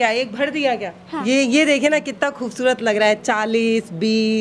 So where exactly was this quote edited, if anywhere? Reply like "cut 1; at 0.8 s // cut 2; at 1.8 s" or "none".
cut 1; at 1.1 s